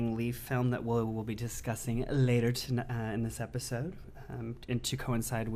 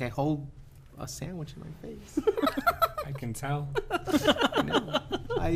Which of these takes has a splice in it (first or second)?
second